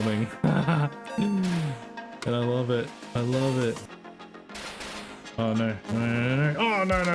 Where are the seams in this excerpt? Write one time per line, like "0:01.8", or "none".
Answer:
0:03.9